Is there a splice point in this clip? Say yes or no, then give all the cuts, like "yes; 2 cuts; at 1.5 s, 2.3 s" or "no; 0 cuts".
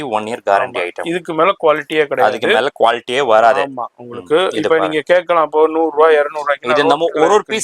no; 0 cuts